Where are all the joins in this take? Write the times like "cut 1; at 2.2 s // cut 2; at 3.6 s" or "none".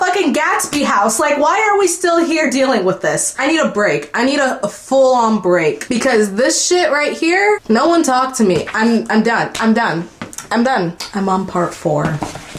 none